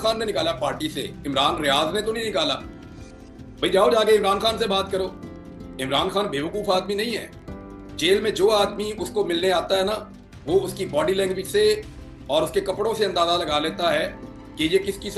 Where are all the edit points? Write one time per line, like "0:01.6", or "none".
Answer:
0:05.4